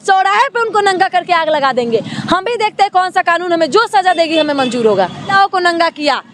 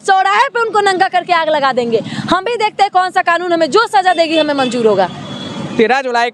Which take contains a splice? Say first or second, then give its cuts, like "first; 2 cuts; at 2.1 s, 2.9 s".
first; 1 cut; at 5.3 s